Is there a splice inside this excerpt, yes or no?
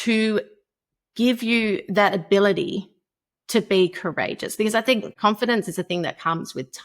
yes